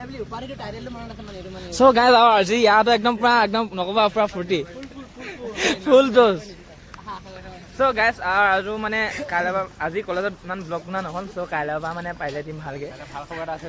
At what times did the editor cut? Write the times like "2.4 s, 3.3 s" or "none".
none

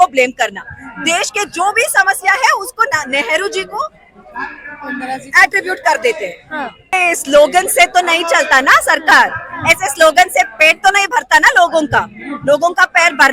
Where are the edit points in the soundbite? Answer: 6.9 s

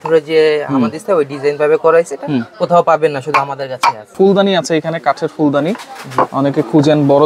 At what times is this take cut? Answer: 4.1 s

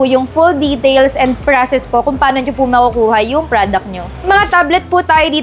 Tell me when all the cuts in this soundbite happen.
4.1 s

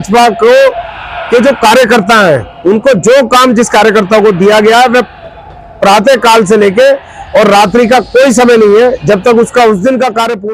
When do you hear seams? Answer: none

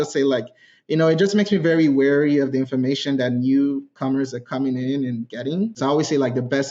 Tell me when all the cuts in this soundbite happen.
5.8 s

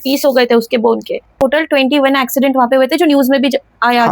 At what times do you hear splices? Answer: 1.4 s

